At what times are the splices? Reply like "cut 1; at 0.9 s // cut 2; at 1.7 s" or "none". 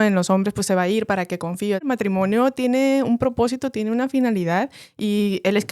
cut 1; at 1.9 s